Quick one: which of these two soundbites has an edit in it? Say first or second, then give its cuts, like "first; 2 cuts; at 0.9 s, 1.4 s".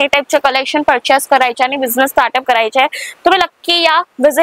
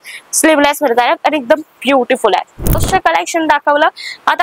second; 1 cut; at 2.8 s